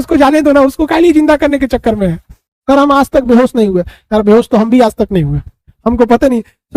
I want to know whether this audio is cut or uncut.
cut